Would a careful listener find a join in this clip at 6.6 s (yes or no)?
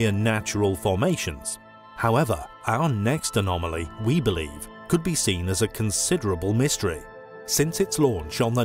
no